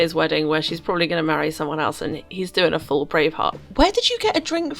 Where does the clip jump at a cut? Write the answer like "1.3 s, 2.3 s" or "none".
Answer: 3.5 s

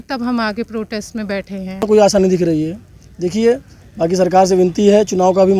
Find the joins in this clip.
1.8 s

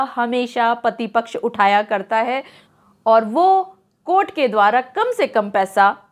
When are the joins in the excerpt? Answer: 2.6 s

